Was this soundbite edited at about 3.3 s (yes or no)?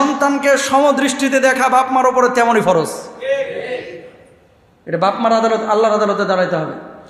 no